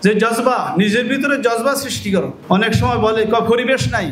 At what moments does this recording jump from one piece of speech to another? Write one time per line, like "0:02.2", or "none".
none